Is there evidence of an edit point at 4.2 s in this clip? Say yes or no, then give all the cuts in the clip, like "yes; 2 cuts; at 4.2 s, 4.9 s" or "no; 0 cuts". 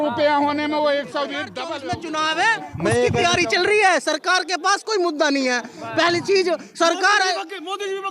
no; 1 cut; at 1.6 s